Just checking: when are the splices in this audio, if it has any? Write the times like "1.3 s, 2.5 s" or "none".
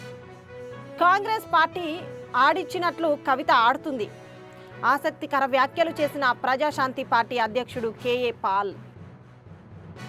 none